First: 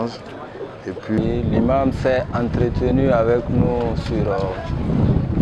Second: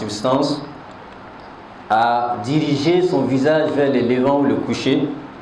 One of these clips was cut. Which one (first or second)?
first